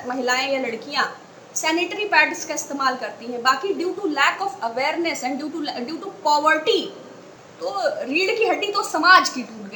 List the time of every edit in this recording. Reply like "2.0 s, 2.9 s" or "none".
7.3 s